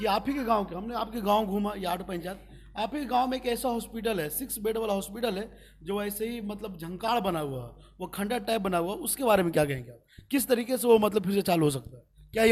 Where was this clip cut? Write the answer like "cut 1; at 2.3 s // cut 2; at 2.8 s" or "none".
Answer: none